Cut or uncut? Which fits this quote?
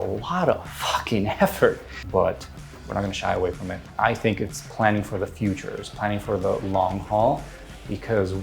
cut